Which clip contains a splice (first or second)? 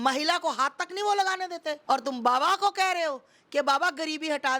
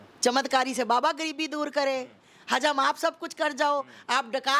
first